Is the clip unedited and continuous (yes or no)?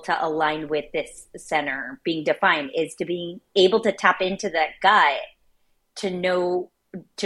yes